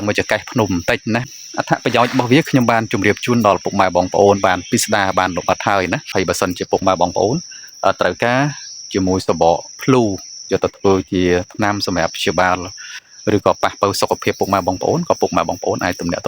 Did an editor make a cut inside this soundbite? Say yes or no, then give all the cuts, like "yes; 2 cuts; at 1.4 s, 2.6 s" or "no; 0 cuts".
yes; 2 cuts; at 1.4 s, 6.1 s